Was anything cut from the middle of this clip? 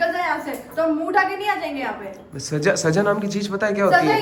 no; 0 cuts

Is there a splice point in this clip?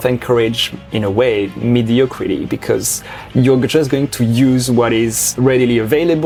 no; 0 cuts

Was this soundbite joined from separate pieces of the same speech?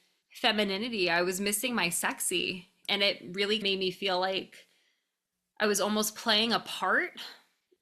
yes; 1 cut; at 3.6 s

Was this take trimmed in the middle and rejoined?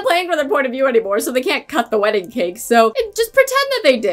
yes; 1 cut; at 2.9 s

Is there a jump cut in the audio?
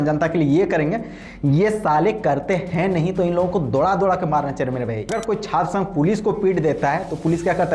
yes; 1 cut; at 5.2 s

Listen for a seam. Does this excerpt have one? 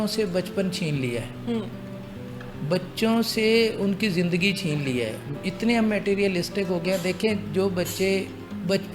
no; 0 cuts

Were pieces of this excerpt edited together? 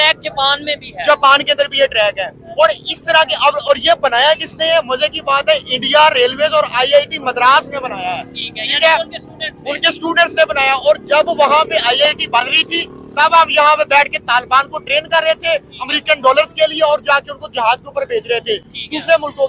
no; 0 cuts

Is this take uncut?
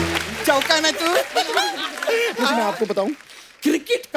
no; 1 cut; at 2.4 s

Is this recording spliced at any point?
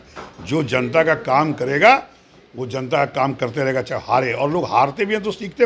no; 0 cuts

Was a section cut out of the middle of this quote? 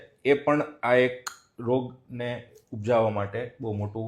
no; 0 cuts

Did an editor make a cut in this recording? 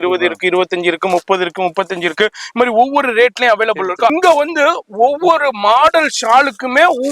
yes; 1 cut; at 4.1 s

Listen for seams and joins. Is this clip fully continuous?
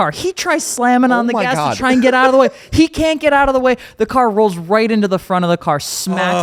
yes; 0 cuts

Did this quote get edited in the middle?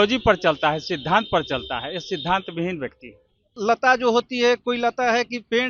yes; 1 cut; at 3.5 s

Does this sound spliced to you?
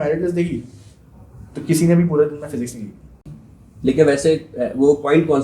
yes; 1 cut; at 3.3 s

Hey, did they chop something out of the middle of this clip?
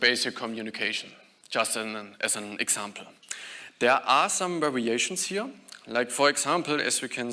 no; 0 cuts

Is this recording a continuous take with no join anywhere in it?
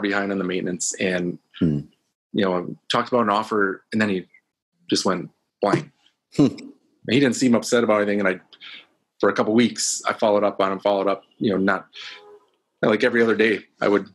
yes; 0 cuts

